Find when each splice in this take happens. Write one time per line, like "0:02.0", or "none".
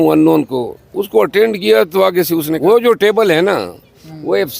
0:02.5